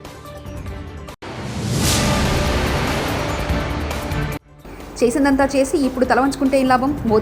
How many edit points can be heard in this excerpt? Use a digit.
2